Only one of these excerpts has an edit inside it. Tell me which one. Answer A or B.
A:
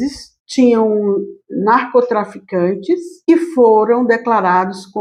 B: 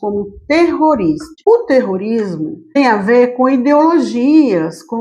B